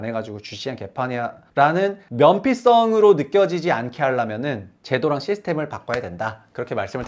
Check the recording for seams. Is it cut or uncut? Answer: cut